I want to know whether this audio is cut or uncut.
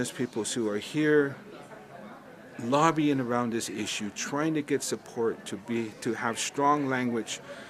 uncut